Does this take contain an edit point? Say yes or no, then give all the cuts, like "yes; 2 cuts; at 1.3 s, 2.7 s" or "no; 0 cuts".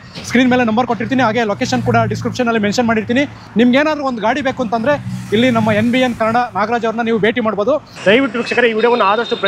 no; 0 cuts